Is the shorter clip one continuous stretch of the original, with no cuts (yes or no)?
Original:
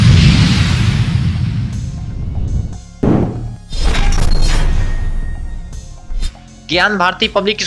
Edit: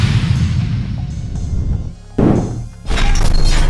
no